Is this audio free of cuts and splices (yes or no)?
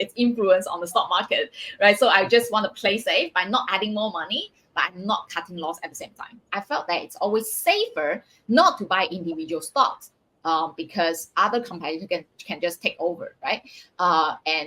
no